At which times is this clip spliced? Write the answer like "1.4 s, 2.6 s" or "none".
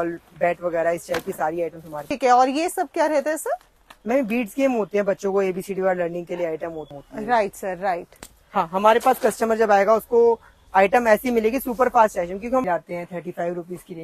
2.1 s, 6.8 s, 12.6 s